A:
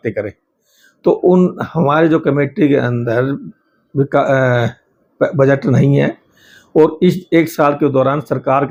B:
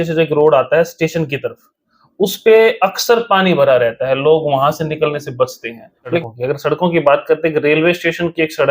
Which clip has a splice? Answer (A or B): B